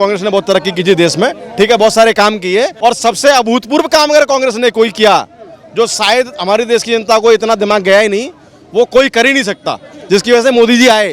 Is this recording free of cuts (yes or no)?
no